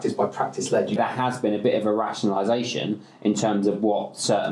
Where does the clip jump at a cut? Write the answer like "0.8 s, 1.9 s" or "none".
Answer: 1.0 s